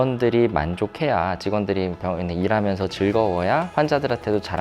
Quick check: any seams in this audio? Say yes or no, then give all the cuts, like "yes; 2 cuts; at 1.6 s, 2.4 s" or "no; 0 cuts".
no; 0 cuts